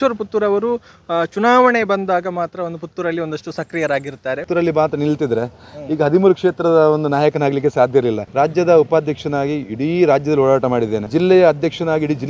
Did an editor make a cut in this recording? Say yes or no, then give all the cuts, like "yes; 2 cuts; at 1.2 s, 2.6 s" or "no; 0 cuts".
yes; 3 cuts; at 4.4 s, 8.2 s, 11.1 s